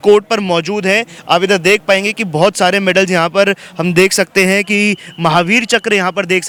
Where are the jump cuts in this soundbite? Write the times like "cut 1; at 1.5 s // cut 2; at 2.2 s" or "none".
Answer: none